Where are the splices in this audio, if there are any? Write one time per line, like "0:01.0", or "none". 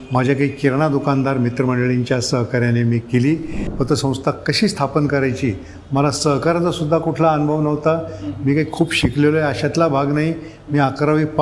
0:03.6